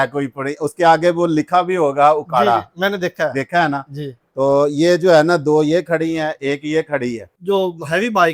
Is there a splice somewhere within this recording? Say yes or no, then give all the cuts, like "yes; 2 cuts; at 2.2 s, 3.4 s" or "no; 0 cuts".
yes; 1 cut; at 7.3 s